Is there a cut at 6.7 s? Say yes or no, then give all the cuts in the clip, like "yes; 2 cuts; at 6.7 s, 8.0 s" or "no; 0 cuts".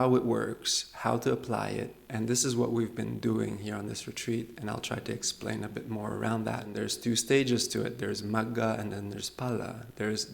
yes; 1 cut; at 6.7 s